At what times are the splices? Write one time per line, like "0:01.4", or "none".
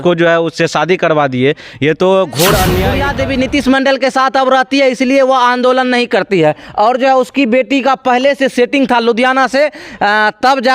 0:03.0